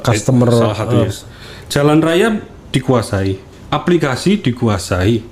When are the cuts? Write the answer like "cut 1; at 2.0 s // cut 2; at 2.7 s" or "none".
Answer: none